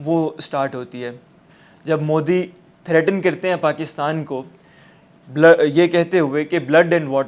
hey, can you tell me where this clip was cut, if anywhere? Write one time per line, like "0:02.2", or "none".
none